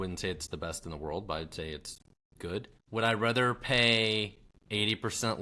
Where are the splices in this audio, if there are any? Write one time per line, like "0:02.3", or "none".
0:02.8